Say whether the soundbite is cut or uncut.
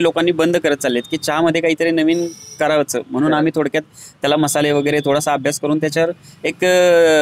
uncut